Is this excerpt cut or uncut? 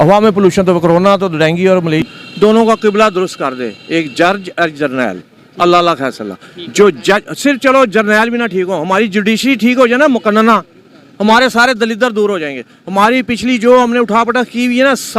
cut